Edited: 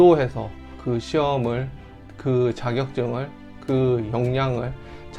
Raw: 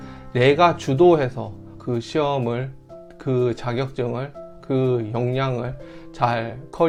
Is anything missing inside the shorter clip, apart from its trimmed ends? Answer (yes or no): no